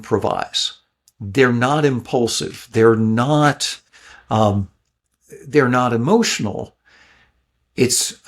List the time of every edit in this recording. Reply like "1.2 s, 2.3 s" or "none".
none